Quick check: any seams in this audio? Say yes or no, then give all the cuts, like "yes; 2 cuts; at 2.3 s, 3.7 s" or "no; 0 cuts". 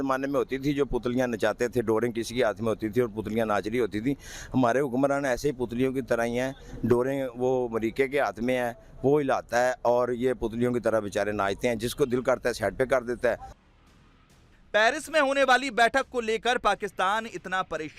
no; 0 cuts